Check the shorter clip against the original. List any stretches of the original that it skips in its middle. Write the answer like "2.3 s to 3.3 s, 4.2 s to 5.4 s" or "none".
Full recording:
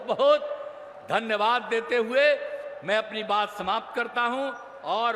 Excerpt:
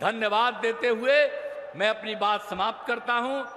none